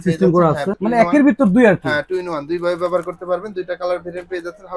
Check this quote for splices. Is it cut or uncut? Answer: uncut